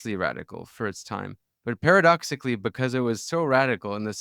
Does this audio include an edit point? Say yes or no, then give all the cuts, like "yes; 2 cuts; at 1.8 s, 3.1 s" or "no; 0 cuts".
yes; 1 cut; at 1.4 s